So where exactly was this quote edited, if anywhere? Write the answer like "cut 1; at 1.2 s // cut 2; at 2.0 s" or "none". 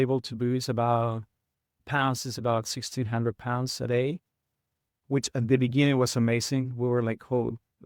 cut 1; at 1.8 s